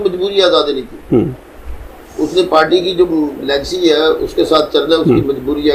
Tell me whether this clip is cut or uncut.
uncut